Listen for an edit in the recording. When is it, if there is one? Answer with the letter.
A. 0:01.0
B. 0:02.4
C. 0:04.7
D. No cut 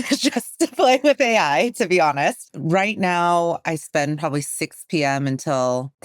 B